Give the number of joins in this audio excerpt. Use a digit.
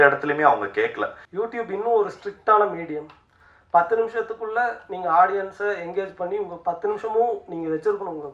1